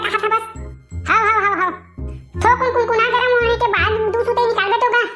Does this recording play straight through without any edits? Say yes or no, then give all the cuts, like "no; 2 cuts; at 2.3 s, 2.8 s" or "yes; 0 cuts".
yes; 0 cuts